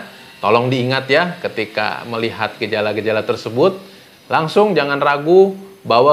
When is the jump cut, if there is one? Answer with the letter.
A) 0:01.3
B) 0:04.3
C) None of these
C